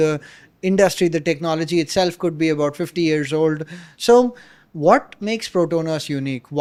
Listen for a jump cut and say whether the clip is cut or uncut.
uncut